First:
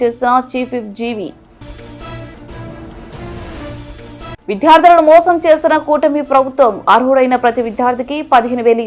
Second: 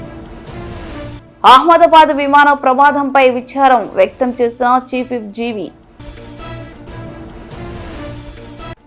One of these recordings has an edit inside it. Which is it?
second; 1 cut; at 1.1 s

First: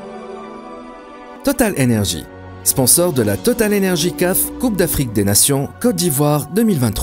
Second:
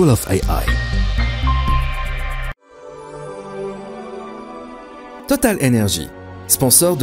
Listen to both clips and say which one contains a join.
second; 1 cut; at 2.7 s

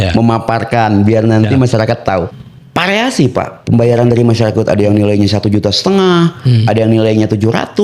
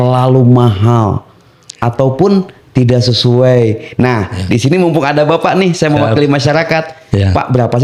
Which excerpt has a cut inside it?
first; 1 cut; at 2.3 s

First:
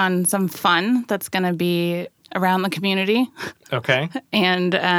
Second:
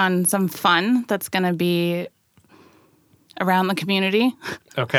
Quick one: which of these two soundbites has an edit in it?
first; 1 cut; at 2.2 s

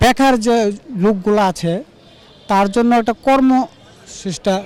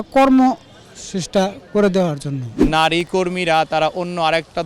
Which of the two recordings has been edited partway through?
second; 1 cut; at 2.6 s

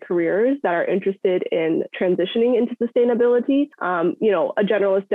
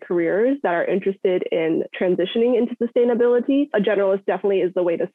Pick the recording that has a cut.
second; 1 cut; at 3.7 s

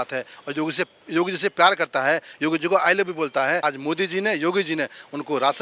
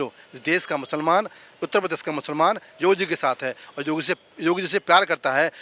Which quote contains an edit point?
first; 1 cut; at 3.6 s

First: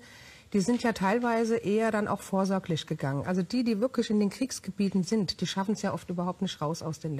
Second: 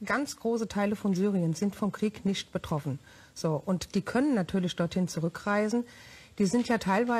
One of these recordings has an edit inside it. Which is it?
second; 1 cut; at 4.6 s

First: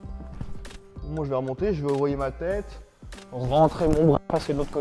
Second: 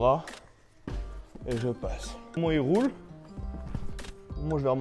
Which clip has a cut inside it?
second; 1 cut; at 2.4 s

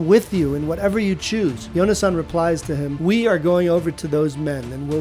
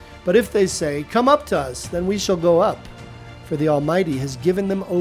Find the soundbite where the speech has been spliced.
first; 2 cuts; at 1.6 s, 2.9 s

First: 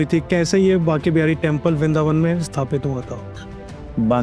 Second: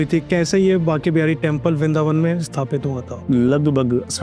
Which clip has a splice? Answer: second; 1 cut; at 3.1 s

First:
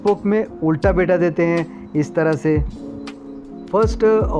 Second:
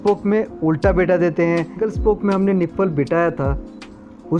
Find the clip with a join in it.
second; 1 cut; at 1.8 s

